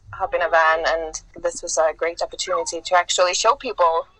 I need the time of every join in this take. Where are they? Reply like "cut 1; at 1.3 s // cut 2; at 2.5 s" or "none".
cut 1; at 1.2 s